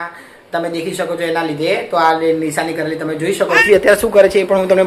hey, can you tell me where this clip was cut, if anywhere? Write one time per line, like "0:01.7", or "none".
0:03.6